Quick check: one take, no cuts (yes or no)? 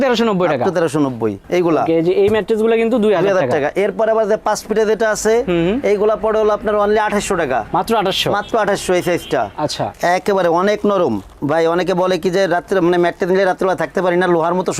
no